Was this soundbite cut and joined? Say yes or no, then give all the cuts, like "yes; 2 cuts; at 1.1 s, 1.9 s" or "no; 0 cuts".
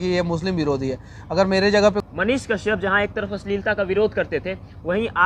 yes; 1 cut; at 2.0 s